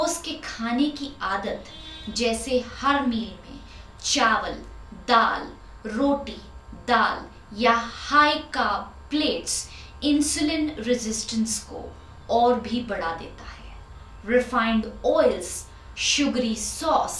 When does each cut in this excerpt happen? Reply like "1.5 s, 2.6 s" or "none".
none